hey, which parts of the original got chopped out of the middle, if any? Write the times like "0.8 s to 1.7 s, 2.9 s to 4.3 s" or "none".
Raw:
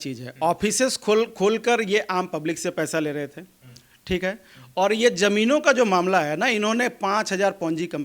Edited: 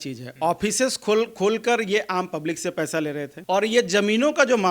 3.3 s to 4.6 s